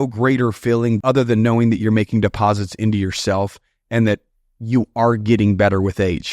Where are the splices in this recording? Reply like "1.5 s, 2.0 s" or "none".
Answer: 1.0 s

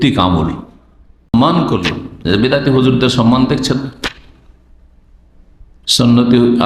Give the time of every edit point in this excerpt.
1.3 s

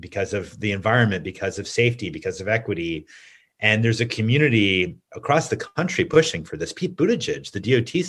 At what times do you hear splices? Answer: none

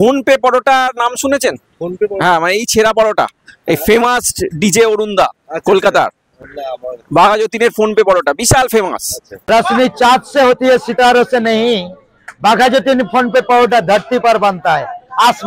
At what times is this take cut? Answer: none

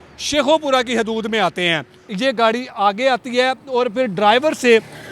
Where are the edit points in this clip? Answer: 2.0 s

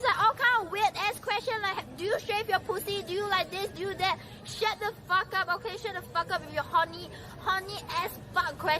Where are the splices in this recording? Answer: 1.9 s

